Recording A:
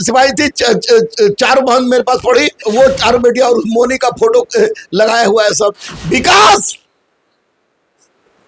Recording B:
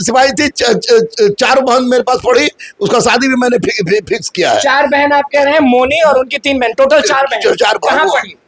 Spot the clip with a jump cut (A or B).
A